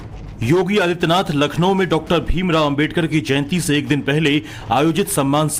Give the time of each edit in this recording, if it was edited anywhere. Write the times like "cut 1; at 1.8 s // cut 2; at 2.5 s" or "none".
none